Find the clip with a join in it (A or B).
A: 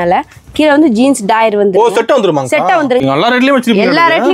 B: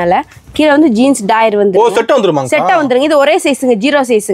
A